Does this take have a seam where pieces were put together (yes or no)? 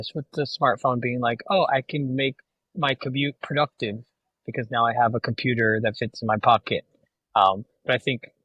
no